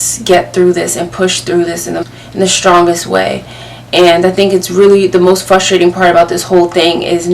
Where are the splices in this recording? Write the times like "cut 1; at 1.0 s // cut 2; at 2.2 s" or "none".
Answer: cut 1; at 2.0 s